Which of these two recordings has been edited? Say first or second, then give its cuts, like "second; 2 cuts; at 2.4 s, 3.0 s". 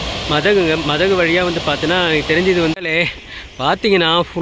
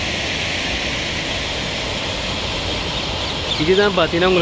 first; 1 cut; at 2.7 s